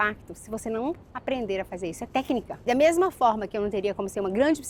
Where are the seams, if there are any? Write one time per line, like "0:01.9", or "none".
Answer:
0:02.7